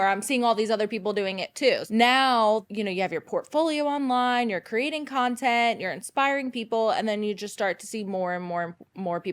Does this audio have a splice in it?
yes; 2 cuts; at 1.8 s, 2.6 s

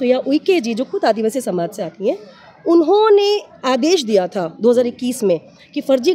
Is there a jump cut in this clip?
no; 0 cuts

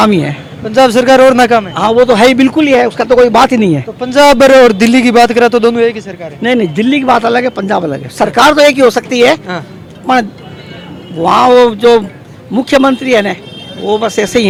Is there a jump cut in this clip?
no; 0 cuts

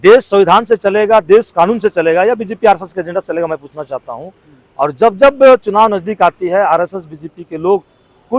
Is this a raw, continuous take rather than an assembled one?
yes; 0 cuts

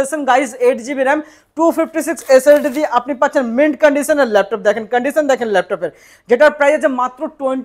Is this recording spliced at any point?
no; 0 cuts

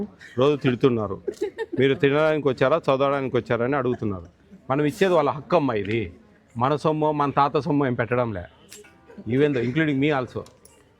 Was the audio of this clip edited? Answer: no; 0 cuts

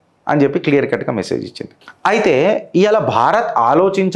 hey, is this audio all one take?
yes; 0 cuts

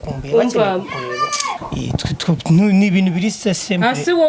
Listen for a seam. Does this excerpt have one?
yes; 1 cut; at 1.6 s

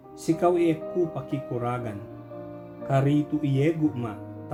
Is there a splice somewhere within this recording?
no; 0 cuts

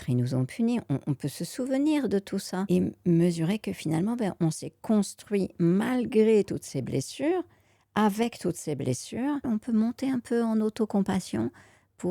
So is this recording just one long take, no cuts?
no; 2 cuts; at 2.6 s, 9.4 s

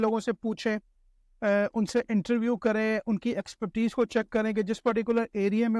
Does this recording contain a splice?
no; 0 cuts

